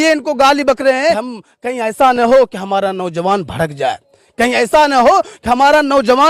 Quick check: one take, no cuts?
no; 1 cut; at 1.3 s

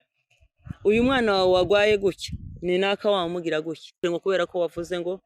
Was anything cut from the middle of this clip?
yes; 1 cut; at 4.0 s

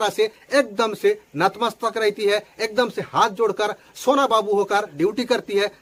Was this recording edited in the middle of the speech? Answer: no; 0 cuts

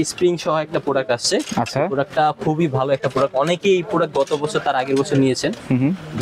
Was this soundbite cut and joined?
no; 0 cuts

